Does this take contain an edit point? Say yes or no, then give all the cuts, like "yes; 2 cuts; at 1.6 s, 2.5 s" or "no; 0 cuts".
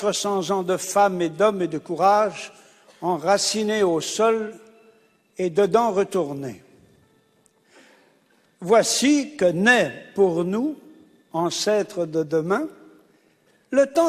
no; 0 cuts